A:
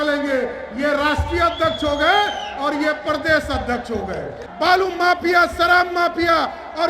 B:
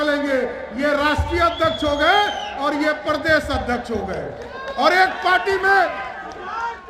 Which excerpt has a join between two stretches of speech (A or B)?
A